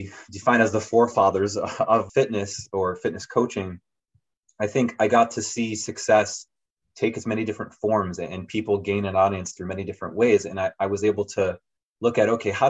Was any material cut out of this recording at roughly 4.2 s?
no; 1 cut; at 2.1 s

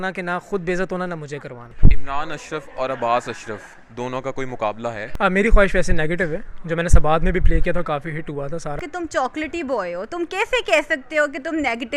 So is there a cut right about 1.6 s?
yes; 3 cuts; at 1.6 s, 5.1 s, 8.8 s

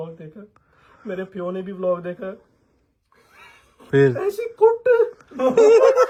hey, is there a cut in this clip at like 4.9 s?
no; 0 cuts

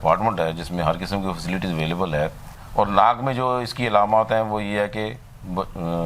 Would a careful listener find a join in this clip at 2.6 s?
yes; 1 cut; at 2.6 s

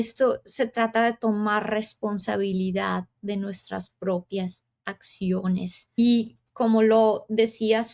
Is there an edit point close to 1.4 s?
no; 1 cut; at 6.0 s

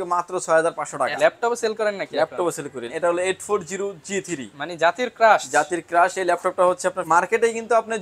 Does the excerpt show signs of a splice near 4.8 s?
no; 3 cuts; at 1.2 s, 2.9 s, 7.0 s

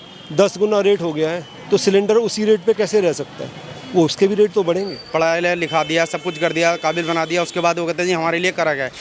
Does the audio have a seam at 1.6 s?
no; 1 cut; at 5.0 s

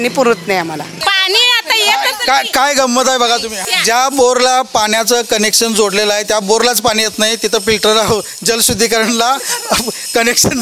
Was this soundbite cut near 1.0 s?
yes; 2 cuts; at 1.0 s, 3.6 s

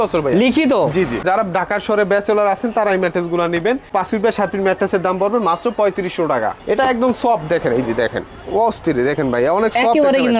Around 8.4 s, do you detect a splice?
no; 2 cuts; at 1.2 s, 6.6 s

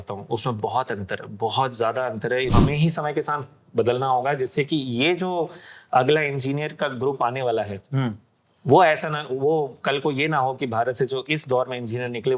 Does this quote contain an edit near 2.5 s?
yes; 1 cut; at 2.5 s

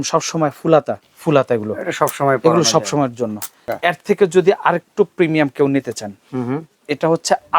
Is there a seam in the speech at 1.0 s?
yes; 2 cuts; at 1.0 s, 3.6 s

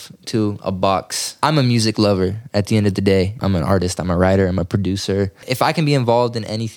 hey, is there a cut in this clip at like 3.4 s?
yes; 3 cuts; at 1.4 s, 3.4 s, 5.5 s

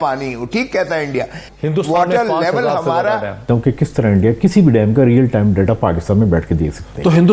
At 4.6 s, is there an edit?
no; 2 cuts; at 1.5 s, 3.4 s

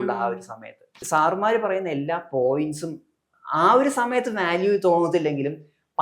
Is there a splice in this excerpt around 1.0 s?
yes; 1 cut; at 1.0 s

